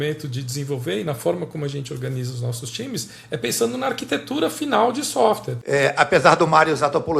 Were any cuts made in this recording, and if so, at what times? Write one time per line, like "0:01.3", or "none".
0:05.5